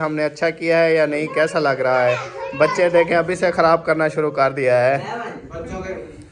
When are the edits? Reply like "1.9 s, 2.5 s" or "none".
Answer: none